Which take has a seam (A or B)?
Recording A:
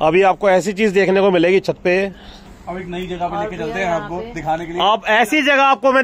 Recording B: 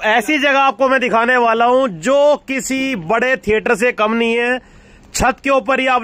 A